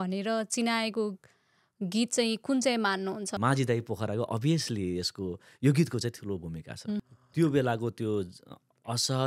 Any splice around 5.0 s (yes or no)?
no